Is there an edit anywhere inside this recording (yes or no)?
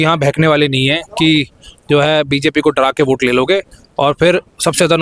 no